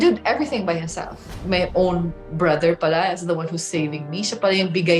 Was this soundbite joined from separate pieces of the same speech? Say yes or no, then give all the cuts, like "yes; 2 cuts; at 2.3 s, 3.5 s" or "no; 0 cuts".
yes; 1 cut; at 1.3 s